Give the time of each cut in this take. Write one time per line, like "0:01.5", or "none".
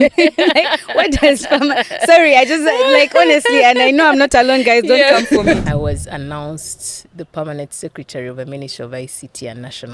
0:05.6